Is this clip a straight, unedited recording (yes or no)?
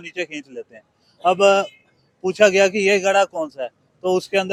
yes